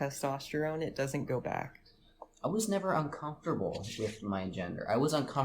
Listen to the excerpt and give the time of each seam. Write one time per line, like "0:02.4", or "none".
0:02.2

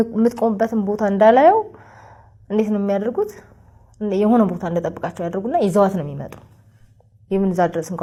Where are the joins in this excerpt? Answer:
none

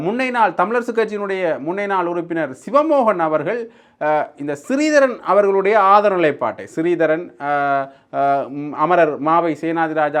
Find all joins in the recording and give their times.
none

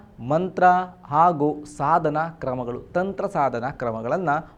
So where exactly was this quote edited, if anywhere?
none

